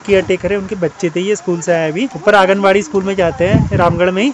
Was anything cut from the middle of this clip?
yes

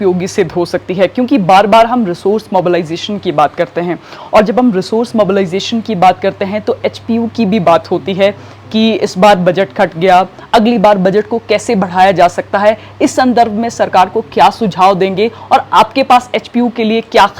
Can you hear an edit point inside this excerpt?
no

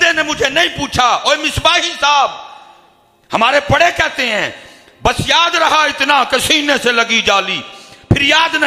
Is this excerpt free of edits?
yes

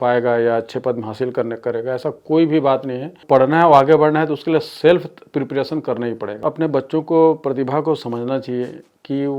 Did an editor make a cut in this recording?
yes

